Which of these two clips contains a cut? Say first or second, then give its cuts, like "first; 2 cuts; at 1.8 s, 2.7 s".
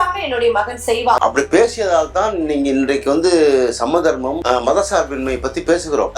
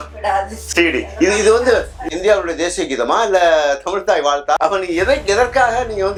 first; 1 cut; at 1.2 s